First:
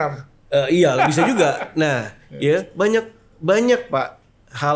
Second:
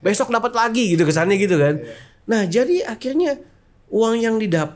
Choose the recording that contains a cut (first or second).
first